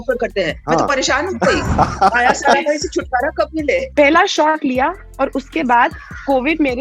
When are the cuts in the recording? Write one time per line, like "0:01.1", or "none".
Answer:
0:03.9